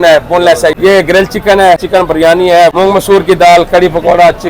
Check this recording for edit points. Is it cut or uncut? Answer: cut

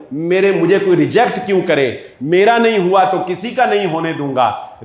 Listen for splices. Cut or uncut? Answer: uncut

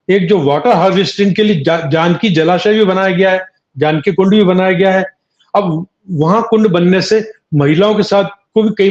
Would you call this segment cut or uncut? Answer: uncut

